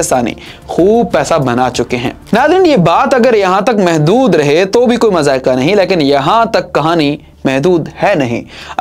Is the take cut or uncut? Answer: uncut